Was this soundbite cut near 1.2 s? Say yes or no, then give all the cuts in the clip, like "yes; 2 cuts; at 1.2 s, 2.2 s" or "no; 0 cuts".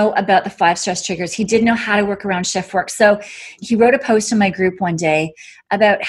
no; 1 cut; at 3.6 s